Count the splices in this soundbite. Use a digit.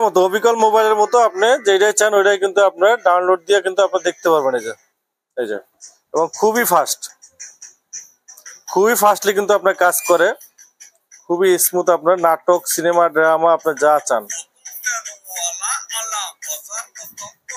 0